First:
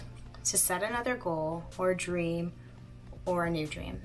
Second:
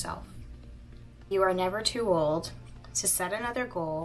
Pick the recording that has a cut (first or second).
second